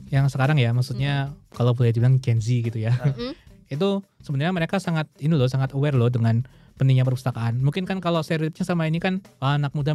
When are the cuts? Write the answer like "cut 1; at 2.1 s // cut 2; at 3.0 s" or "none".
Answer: cut 1; at 1.4 s